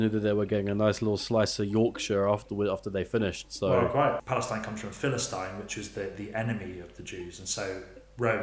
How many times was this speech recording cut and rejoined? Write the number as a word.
one